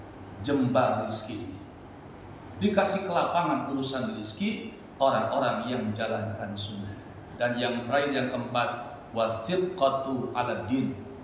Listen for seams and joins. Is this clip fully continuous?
no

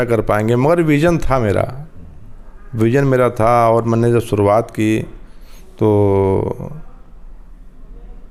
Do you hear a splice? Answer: no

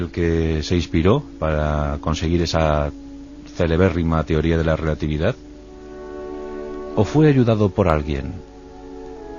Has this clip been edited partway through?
yes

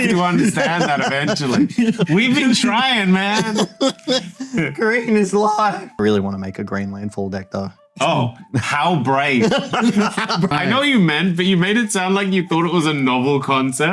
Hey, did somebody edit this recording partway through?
yes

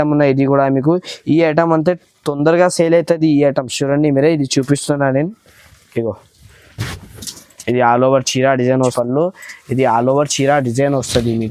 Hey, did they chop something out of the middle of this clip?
yes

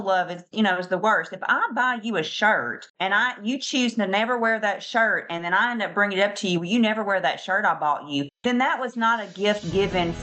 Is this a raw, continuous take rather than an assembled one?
no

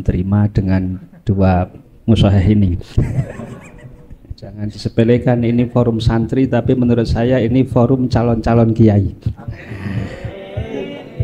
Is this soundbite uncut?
no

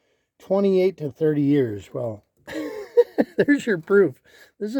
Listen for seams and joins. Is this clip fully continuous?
yes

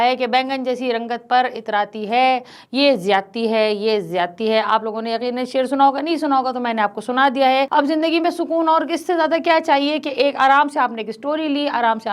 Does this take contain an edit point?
no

